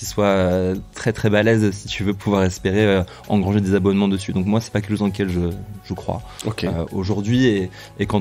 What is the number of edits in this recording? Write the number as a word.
zero